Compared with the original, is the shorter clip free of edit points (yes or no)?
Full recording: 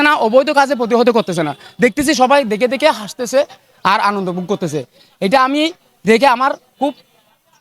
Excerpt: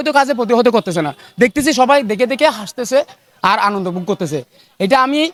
yes